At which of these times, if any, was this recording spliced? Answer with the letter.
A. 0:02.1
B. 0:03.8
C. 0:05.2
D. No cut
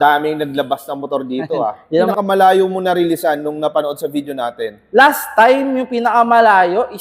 A